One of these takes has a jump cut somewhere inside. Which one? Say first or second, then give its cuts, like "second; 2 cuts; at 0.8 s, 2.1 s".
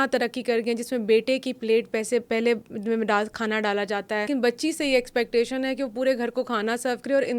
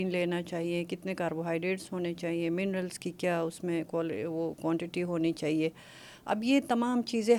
first; 1 cut; at 4.3 s